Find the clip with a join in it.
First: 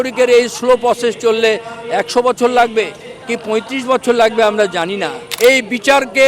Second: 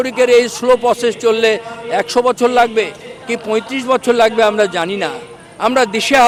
first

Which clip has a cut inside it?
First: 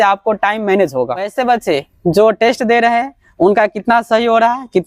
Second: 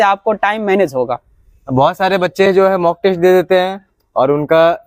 first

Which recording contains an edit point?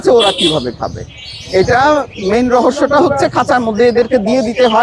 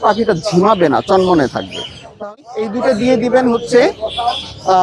second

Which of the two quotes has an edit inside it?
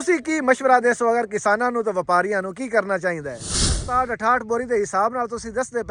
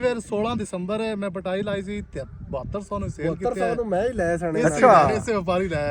first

